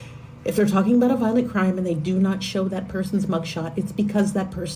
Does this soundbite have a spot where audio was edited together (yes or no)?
no